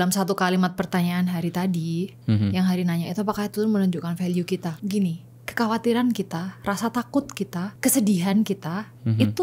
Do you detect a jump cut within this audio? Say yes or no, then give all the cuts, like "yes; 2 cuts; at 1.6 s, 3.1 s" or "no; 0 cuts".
yes; 2 cuts; at 4.7 s, 7.7 s